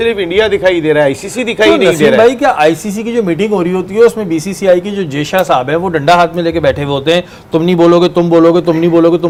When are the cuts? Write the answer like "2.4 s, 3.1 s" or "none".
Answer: none